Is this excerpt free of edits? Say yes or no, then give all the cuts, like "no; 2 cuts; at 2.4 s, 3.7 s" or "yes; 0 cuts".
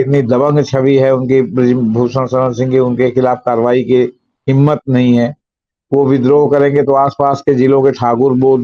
yes; 0 cuts